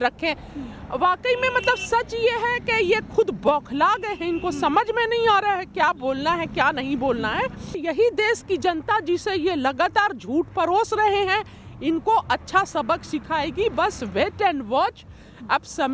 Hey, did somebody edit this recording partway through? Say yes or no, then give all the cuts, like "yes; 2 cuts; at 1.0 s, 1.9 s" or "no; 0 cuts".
yes; 1 cut; at 7.8 s